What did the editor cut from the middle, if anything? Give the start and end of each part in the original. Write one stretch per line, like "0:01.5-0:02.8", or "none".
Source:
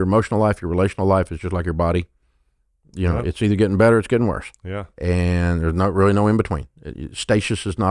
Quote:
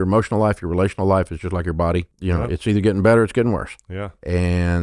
0:02.1-0:02.9